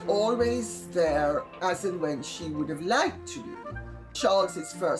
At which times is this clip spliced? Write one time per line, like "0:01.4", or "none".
none